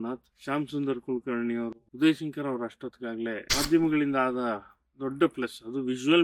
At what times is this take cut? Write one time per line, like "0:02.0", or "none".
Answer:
0:01.8
0:03.5